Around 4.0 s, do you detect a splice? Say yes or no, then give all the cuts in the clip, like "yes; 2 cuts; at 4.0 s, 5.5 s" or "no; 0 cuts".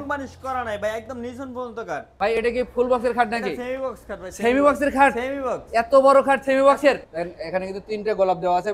no; 2 cuts; at 2.1 s, 7.1 s